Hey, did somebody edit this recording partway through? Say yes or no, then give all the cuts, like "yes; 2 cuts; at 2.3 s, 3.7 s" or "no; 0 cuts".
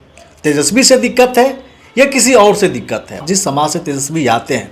yes; 1 cut; at 3.2 s